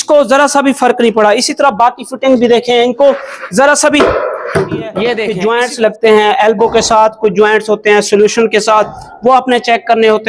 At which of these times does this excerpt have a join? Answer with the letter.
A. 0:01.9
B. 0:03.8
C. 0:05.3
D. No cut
C